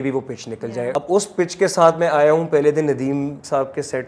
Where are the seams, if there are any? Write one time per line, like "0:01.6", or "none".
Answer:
0:00.9